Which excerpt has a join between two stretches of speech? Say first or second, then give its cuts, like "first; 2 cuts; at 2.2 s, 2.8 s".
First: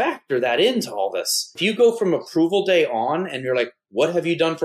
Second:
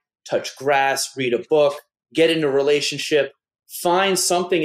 first; 1 cut; at 1.5 s